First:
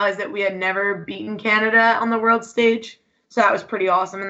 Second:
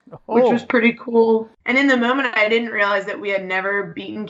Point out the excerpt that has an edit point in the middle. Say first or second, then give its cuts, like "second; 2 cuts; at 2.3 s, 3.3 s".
second; 1 cut; at 1.6 s